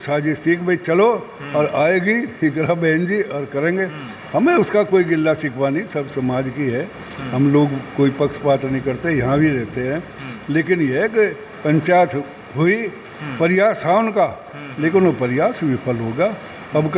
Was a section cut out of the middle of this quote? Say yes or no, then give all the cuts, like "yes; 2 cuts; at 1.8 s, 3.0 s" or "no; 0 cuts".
no; 0 cuts